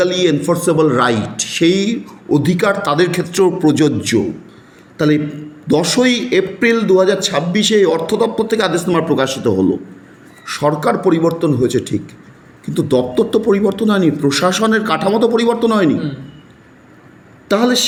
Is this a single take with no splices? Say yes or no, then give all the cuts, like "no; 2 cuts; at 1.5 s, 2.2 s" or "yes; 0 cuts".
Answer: yes; 0 cuts